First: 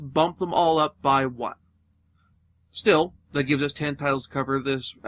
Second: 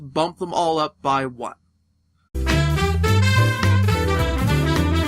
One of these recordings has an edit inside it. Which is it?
first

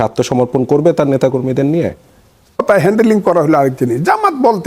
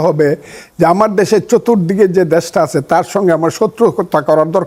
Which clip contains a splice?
first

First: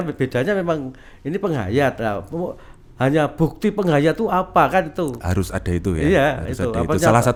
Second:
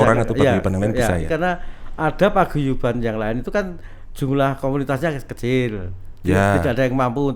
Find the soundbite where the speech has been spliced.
second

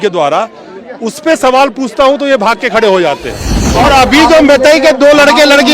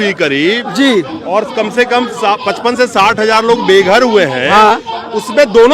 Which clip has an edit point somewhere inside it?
first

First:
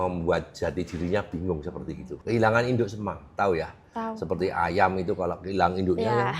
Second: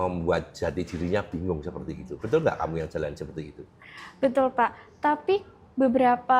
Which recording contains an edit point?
first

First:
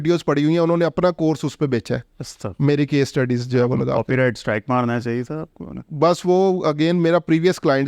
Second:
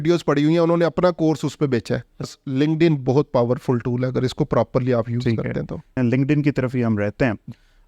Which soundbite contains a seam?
second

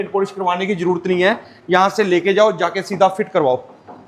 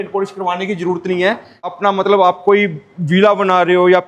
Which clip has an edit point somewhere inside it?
second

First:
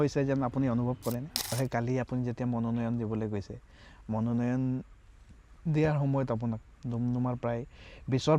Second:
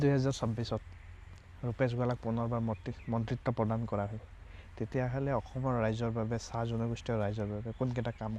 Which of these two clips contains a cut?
first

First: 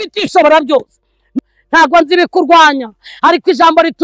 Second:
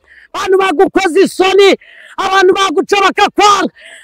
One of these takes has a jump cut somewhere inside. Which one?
first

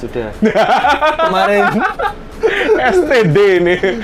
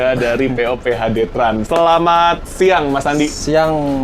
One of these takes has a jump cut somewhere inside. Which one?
second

